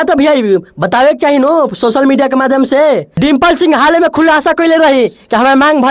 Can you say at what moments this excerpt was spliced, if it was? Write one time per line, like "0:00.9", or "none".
0:03.1